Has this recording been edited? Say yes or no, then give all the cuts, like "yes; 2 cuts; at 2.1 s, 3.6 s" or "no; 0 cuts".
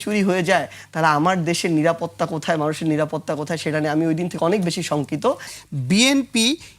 yes; 1 cut; at 5.5 s